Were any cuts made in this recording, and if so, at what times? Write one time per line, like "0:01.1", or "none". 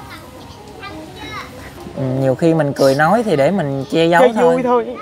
0:01.8